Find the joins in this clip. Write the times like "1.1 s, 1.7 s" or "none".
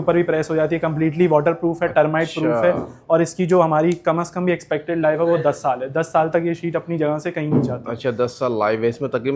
none